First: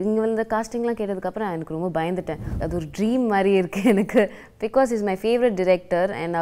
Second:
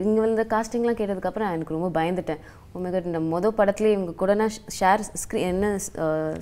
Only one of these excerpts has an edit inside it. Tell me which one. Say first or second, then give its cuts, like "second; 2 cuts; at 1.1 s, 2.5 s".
first; 1 cut; at 2.6 s